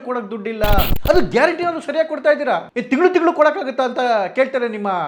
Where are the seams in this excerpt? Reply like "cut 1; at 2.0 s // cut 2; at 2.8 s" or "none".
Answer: cut 1; at 0.9 s